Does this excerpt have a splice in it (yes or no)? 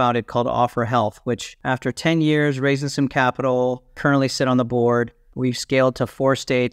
yes